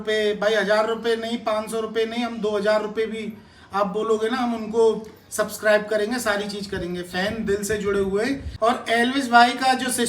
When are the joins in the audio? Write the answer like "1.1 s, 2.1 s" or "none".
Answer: 8.5 s

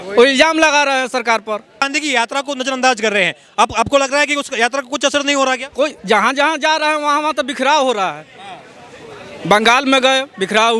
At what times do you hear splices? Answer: 1.9 s

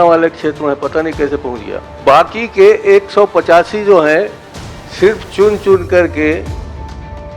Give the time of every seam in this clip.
1.8 s

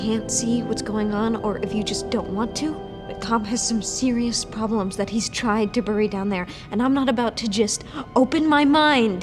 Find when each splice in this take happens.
none

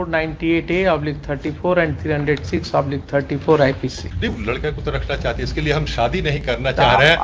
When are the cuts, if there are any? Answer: 4.1 s

